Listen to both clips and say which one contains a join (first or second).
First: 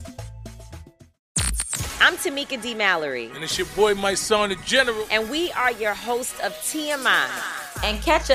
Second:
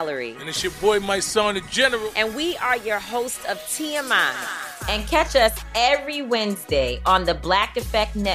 first